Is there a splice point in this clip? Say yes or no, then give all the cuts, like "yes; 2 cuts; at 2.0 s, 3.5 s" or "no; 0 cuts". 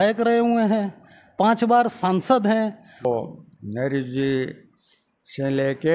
yes; 1 cut; at 3.1 s